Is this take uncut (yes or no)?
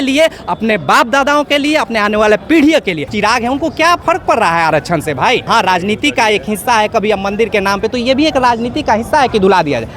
no